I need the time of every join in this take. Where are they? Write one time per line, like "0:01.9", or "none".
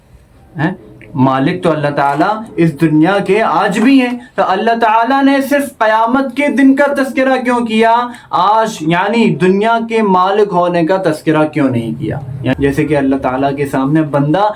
0:12.5